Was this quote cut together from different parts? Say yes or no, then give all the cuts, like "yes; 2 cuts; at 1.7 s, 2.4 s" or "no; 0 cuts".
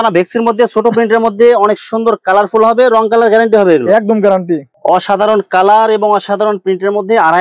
yes; 1 cut; at 4.7 s